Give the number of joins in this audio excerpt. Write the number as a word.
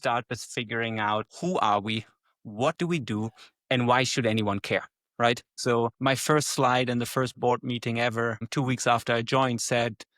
two